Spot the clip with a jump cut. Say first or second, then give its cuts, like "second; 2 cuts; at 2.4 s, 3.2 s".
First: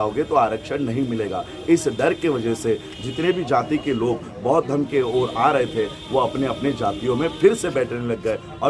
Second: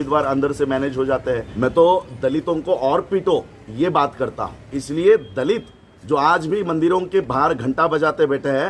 second; 2 cuts; at 1.5 s, 4.7 s